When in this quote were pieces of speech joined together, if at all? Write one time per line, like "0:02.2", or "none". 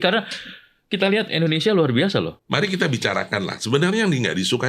0:02.4

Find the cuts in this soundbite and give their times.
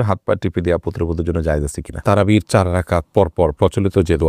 0:01.9

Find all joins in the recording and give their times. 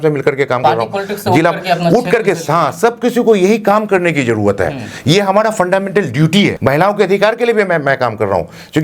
0:06.6

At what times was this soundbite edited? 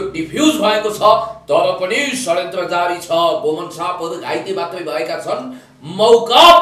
none

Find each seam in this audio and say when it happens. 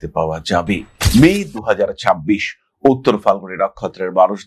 0:00.9

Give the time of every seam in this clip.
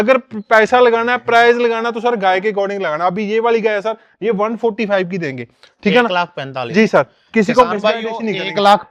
none

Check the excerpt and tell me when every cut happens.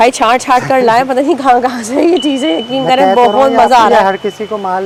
none

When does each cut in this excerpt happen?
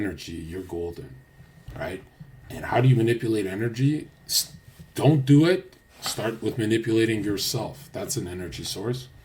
none

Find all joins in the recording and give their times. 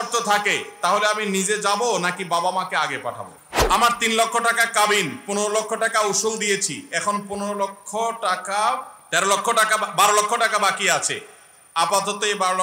0:03.3
0:09.0

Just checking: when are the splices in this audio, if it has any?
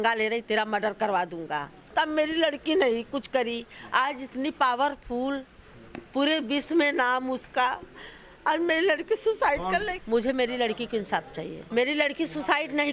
0:01.8
0:09.9
0:11.6

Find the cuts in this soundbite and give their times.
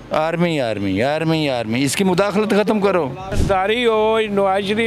0:03.3

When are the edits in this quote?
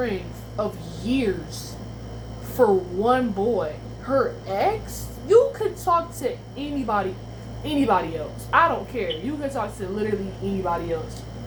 none

